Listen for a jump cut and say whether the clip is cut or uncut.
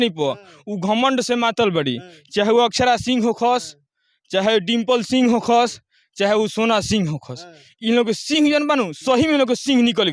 uncut